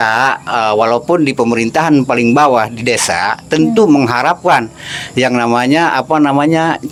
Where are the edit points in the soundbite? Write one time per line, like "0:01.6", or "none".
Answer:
none